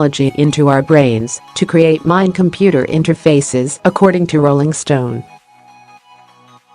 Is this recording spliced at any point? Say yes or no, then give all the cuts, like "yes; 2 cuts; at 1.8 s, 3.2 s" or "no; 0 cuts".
yes; 1 cut; at 5.2 s